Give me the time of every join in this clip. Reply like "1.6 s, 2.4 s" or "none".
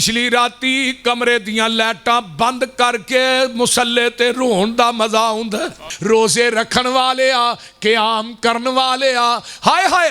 5.9 s

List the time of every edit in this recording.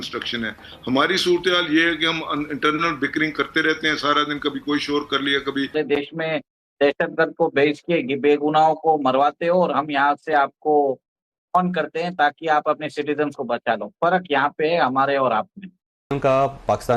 5.7 s, 16.0 s

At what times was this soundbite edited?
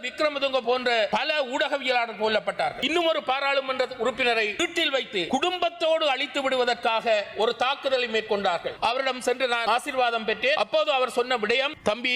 1.1 s, 2.8 s, 5.3 s, 8.7 s, 9.6 s, 10.6 s

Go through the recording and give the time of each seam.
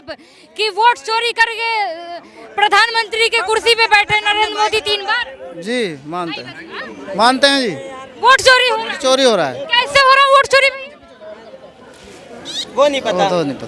none

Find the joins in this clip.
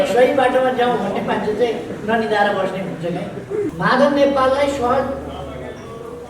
3.7 s

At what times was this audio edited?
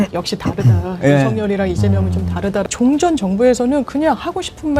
2.7 s

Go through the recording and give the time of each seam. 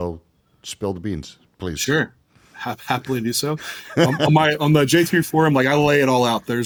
none

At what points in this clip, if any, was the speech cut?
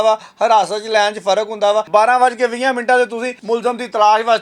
1.9 s, 3.3 s

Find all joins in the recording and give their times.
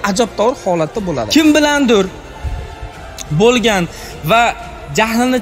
1.3 s

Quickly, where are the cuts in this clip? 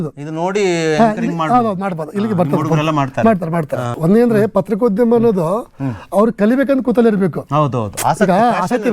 4.0 s

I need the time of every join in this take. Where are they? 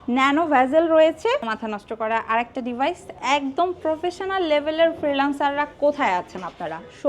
1.5 s

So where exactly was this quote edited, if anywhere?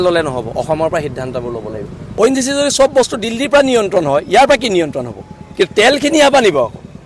2.0 s

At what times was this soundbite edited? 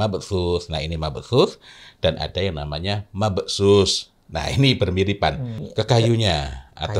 5.6 s

